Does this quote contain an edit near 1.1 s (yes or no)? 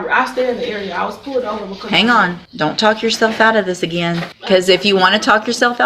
no